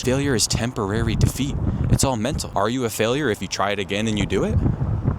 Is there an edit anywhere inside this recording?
yes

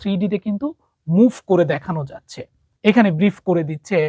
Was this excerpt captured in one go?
no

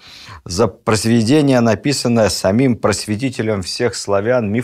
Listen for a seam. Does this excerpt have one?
no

